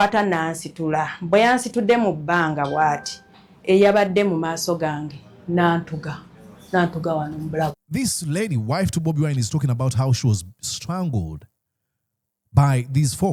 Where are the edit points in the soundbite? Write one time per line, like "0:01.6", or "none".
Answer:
none

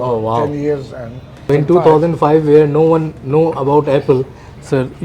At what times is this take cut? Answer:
0:01.5

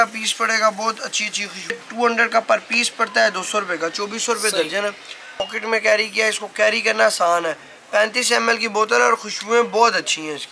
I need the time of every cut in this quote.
0:01.8
0:05.4

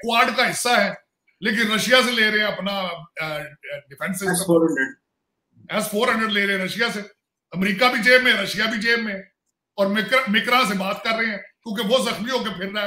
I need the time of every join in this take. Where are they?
none

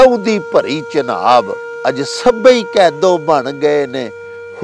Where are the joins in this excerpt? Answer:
0:01.6

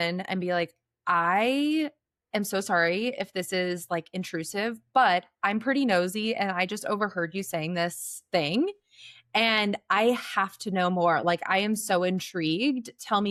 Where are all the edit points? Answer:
none

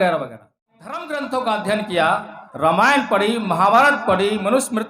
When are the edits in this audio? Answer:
0:01.0

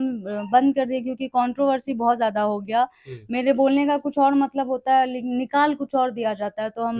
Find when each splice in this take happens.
none

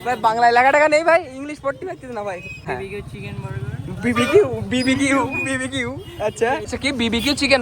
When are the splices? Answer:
0:02.6
0:06.7

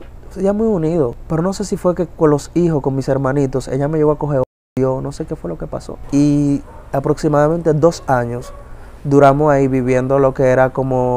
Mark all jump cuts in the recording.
0:01.2
0:05.9

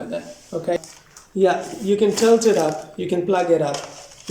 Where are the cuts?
0:00.9

